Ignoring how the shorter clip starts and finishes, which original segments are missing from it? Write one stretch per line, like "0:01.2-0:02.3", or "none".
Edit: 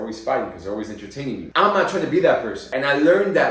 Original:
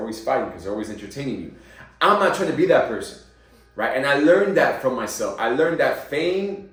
0:01.4-0:01.9
0:03.2-0:03.9